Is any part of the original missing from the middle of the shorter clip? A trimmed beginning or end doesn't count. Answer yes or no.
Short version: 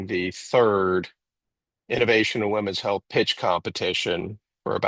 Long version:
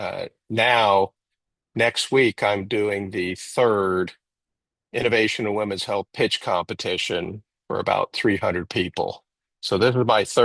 no